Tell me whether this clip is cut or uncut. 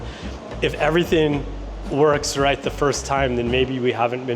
uncut